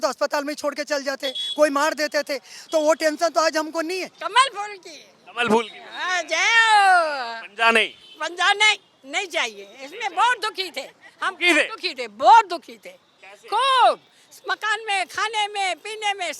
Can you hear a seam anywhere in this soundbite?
yes; 1 cut; at 4.1 s

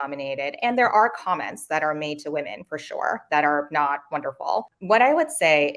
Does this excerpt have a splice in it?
yes; 1 cut; at 4.7 s

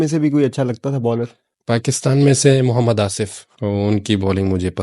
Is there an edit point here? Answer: yes; 2 cuts; at 1.5 s, 3.4 s

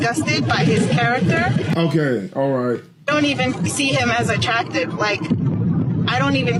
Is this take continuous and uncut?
yes; 0 cuts

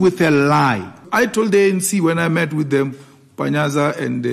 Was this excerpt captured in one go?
no; 1 cut; at 1.0 s

